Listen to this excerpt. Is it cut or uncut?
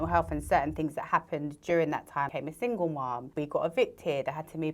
cut